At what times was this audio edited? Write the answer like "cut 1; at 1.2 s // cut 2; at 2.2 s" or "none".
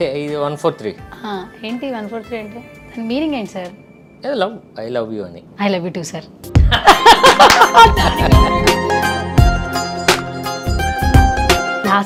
none